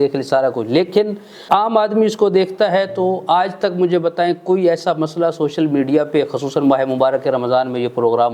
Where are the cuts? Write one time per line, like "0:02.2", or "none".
0:01.4